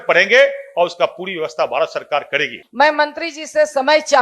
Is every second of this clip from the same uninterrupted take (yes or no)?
no